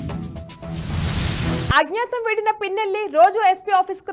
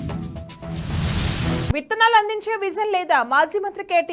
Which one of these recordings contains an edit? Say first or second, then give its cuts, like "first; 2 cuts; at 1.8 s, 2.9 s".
first; 1 cut; at 1.7 s